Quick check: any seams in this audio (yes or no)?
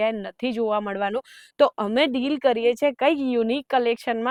no